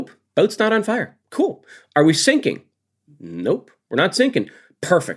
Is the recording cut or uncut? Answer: cut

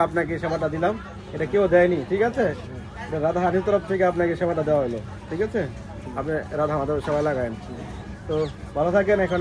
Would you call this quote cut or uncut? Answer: uncut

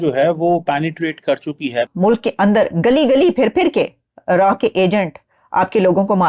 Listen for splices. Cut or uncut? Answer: cut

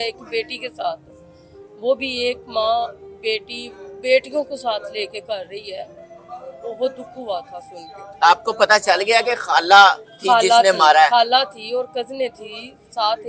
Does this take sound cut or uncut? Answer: uncut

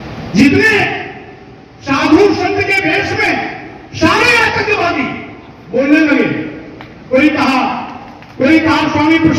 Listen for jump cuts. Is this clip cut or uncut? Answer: uncut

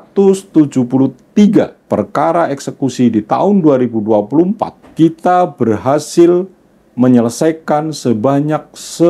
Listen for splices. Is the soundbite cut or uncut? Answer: cut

